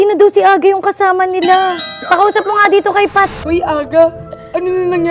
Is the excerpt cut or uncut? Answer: cut